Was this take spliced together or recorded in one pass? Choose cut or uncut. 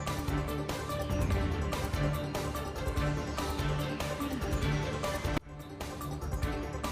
uncut